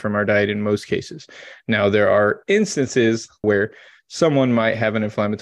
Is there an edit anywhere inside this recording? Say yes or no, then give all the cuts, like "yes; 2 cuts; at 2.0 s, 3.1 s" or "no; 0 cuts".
yes; 1 cut; at 3.4 s